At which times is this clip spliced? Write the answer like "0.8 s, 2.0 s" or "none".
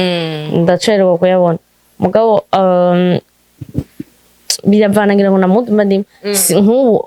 none